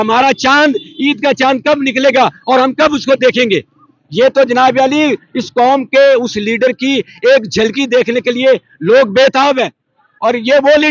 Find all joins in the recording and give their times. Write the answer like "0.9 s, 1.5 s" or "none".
none